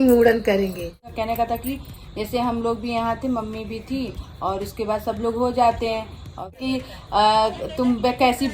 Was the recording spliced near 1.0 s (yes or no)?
yes